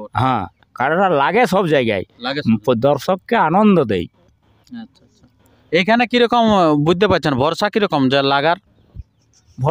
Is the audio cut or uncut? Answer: uncut